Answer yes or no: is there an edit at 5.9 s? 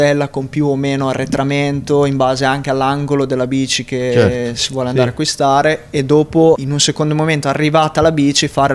no